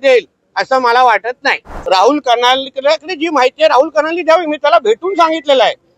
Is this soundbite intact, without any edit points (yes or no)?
no